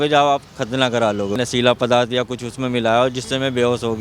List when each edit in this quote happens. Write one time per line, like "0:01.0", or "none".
0:01.4